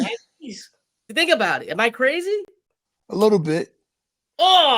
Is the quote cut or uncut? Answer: cut